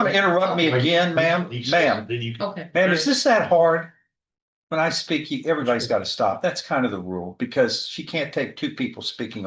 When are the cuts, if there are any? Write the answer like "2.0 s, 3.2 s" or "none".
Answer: none